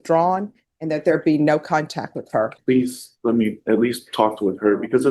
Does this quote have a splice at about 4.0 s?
no; 1 cut; at 2.6 s

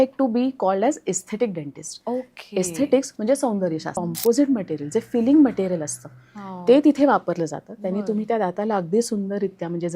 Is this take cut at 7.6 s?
no; 1 cut; at 4.0 s

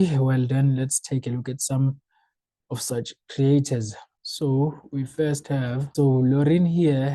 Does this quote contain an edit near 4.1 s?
no; 1 cut; at 5.9 s

